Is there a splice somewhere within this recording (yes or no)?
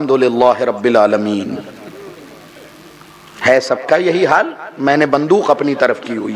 no